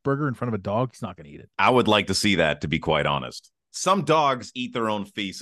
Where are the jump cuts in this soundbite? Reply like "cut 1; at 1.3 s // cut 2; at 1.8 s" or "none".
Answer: cut 1; at 3.7 s